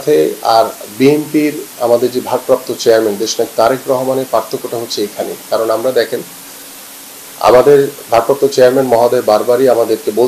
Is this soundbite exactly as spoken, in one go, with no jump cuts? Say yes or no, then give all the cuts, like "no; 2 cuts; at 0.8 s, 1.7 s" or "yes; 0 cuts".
yes; 0 cuts